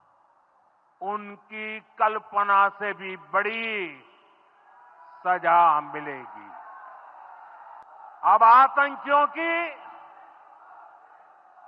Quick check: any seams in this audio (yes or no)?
yes